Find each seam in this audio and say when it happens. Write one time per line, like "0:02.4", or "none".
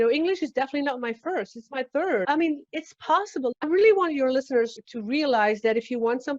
0:02.3
0:03.6